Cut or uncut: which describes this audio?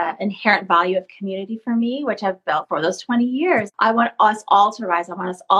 cut